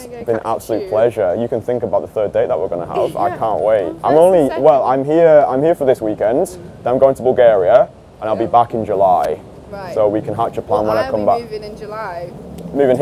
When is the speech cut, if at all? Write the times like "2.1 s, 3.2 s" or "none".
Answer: none